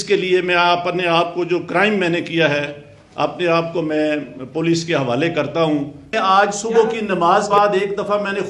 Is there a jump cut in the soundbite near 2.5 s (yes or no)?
no